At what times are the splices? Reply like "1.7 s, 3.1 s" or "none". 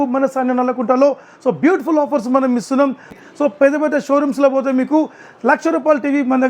3.1 s